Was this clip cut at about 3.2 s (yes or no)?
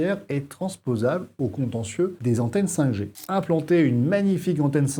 yes